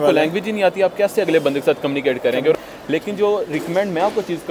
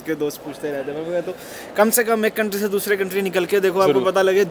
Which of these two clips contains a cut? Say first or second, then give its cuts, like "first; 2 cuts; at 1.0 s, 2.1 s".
first; 1 cut; at 2.5 s